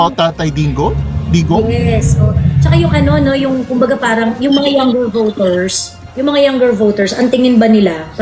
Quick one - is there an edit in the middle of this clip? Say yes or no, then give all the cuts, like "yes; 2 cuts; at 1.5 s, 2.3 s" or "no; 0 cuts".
no; 0 cuts